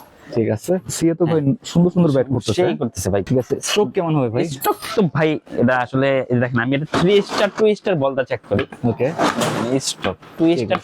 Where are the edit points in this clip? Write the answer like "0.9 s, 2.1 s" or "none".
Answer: 0.9 s, 3.2 s